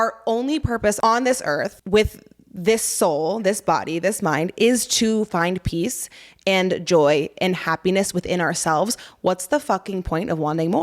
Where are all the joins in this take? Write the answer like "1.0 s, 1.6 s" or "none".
1.0 s, 1.8 s